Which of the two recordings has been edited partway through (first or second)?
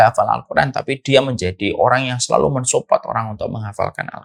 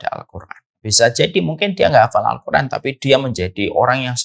second